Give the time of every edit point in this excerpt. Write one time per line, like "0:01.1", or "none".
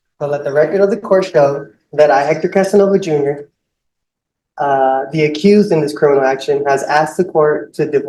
none